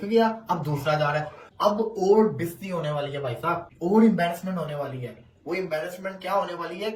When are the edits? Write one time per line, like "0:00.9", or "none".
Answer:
none